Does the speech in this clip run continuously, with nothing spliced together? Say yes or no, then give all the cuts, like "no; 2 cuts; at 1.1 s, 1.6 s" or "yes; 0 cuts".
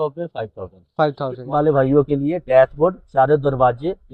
no; 1 cut; at 1.4 s